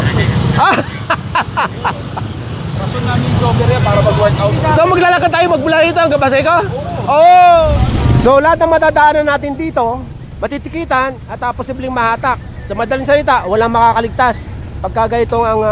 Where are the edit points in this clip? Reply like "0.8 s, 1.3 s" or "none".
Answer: 7.7 s

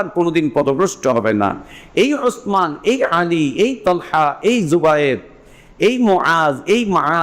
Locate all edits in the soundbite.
none

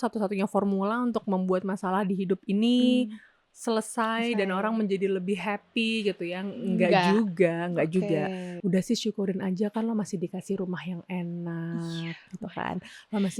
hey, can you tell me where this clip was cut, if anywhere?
8.5 s

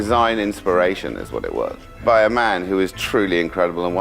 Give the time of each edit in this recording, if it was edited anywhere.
2.0 s

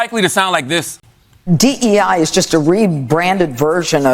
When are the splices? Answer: 1.4 s

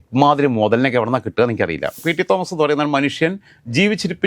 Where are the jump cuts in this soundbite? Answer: 1.9 s

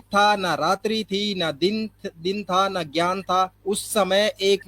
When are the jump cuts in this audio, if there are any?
3.6 s

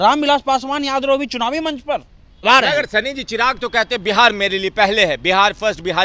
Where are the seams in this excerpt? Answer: 2.4 s

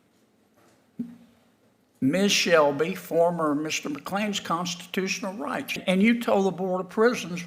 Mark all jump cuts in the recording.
5.8 s

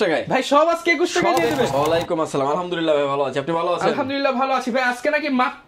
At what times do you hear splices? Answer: 1.7 s

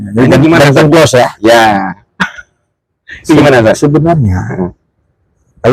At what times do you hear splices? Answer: none

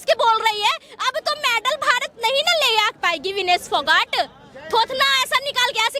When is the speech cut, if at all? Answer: none

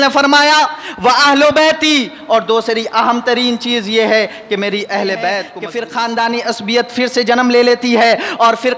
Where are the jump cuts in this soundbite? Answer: 5.6 s

